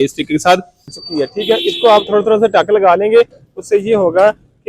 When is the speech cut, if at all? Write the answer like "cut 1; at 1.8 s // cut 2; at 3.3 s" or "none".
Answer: cut 1; at 1.0 s